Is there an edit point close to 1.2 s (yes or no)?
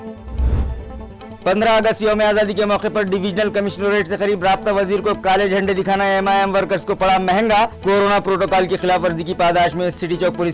yes